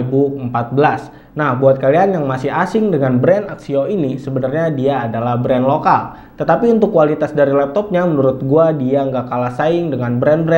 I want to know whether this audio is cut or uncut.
uncut